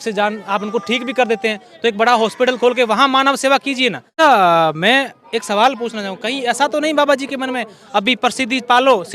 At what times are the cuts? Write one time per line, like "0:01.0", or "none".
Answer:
0:04.1